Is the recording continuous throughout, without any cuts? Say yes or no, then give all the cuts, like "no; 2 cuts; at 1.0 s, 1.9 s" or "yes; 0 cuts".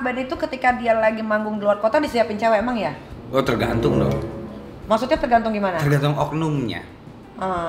yes; 0 cuts